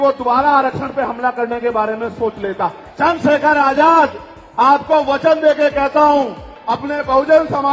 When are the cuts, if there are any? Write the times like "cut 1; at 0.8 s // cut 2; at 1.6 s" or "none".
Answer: cut 1; at 2.8 s

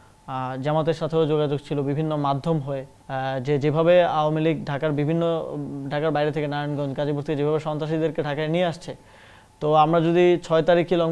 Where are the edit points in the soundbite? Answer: cut 1; at 3.0 s

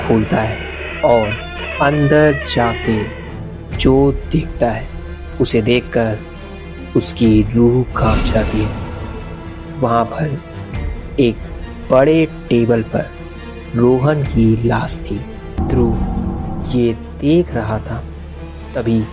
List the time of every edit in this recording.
cut 1; at 15.6 s

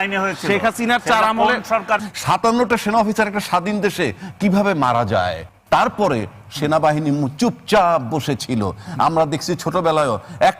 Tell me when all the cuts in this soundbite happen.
cut 1; at 2.1 s // cut 2; at 5.5 s

